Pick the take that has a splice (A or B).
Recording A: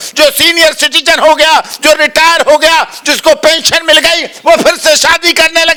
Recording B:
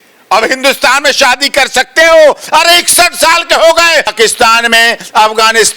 B